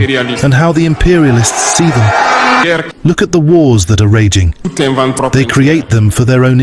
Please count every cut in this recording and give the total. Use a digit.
1